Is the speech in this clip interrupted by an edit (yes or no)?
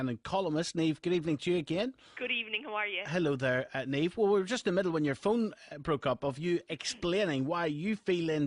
no